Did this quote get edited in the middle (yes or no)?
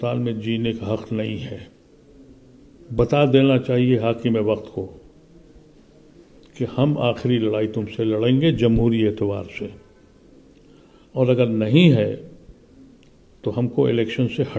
no